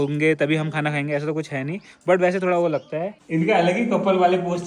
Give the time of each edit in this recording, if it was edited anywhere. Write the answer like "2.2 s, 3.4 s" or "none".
3.2 s